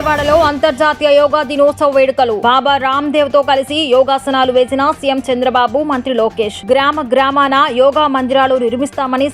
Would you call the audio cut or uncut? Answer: uncut